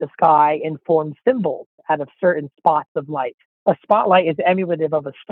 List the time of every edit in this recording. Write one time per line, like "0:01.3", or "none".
0:03.4